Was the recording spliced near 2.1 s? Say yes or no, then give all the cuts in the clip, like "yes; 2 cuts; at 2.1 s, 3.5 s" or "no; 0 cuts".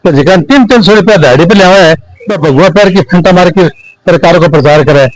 no; 0 cuts